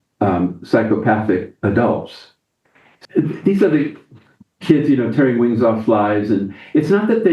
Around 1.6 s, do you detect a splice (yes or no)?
no